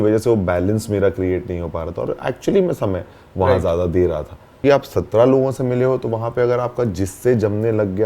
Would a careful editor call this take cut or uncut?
cut